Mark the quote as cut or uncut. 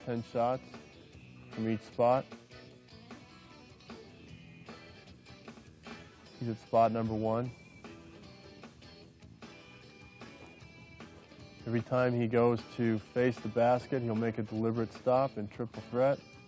uncut